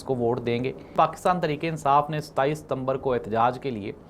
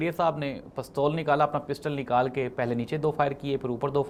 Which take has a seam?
first; 1 cut; at 0.9 s

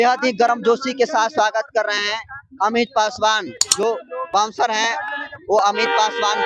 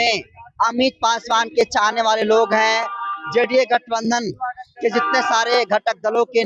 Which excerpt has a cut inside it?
first; 1 cut; at 3.6 s

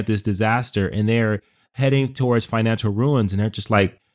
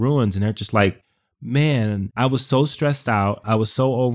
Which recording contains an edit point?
second; 1 cut; at 2.1 s

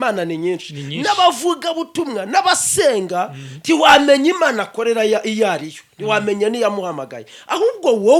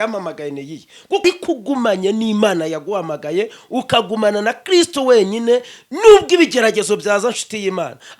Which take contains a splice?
second; 1 cut; at 1.2 s

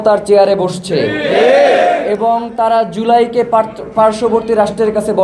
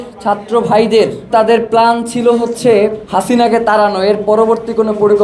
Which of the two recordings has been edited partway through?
second; 2 cuts; at 1.3 s, 3.0 s

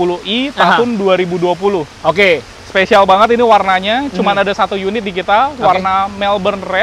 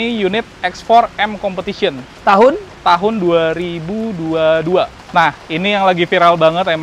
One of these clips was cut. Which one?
second; 1 cut; at 5.0 s

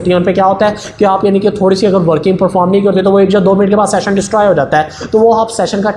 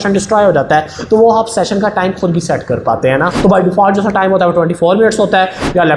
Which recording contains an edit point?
second; 1 cut; at 3.3 s

